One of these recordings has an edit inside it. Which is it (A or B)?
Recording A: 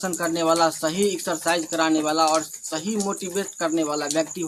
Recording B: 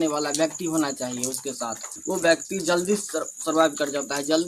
B